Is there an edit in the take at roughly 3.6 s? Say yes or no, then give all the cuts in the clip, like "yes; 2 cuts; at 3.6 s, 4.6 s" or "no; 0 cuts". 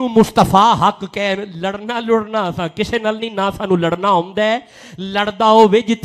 no; 0 cuts